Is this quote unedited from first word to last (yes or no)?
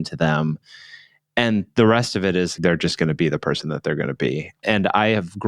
no